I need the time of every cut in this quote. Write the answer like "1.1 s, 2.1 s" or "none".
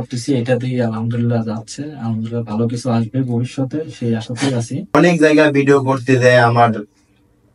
4.9 s